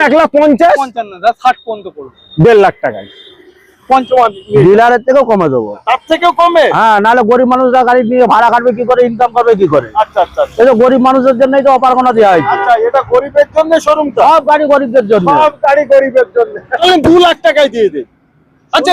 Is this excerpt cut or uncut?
cut